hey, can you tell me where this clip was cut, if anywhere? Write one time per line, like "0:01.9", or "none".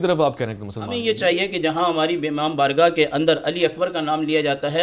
0:01.0